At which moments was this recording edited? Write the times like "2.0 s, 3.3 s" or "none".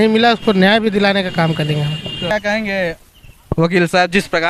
2.2 s